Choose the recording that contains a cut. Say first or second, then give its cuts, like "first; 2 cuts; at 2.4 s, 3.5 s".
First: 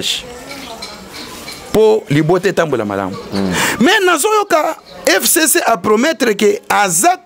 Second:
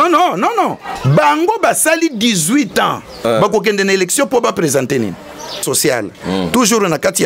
second; 1 cut; at 5.6 s